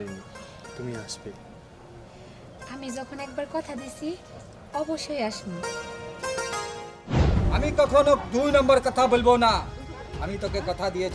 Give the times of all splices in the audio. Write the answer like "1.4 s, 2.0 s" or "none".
7.2 s